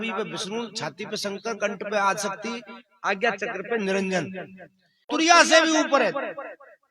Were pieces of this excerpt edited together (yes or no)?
yes